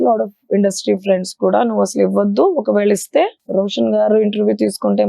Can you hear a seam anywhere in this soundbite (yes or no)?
yes